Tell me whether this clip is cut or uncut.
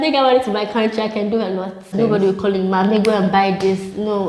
cut